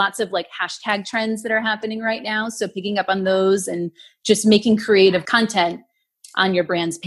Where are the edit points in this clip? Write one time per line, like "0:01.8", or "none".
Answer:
0:05.2